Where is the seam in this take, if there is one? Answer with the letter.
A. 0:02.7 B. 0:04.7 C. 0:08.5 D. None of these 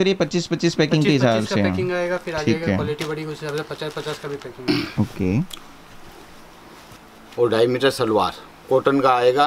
B